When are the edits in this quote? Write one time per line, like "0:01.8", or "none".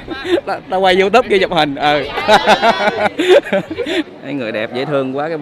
0:04.1